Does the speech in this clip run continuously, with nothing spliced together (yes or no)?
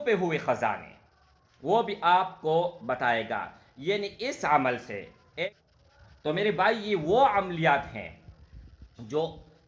no